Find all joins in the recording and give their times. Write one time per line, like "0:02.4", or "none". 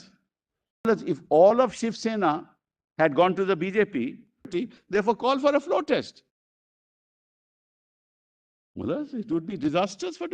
0:00.9
0:04.5